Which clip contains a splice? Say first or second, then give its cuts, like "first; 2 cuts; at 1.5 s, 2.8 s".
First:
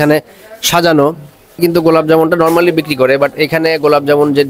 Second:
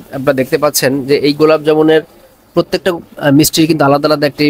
first; 1 cut; at 1.6 s